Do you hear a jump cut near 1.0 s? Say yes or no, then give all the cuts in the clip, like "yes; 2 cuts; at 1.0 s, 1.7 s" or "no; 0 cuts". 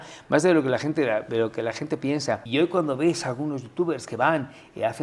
no; 1 cut; at 2.4 s